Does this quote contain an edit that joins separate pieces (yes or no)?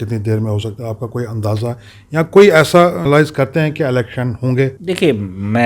yes